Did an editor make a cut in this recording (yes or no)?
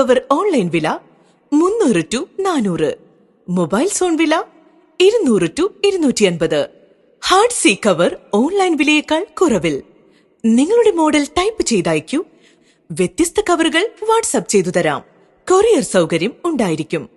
yes